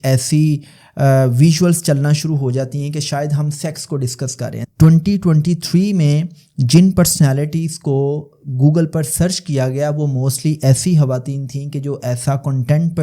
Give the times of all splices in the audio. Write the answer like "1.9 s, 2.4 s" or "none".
4.6 s

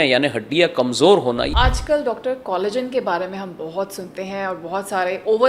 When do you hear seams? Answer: 1.5 s

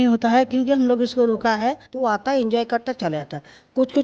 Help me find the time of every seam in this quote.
1.9 s

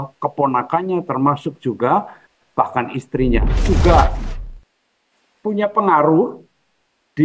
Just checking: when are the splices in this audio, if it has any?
3.6 s

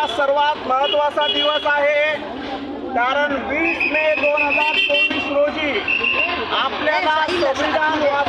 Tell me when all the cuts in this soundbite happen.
none

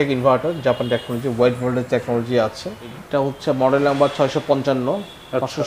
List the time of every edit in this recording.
2.9 s

